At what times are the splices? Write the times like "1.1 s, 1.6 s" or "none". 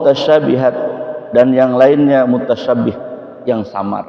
none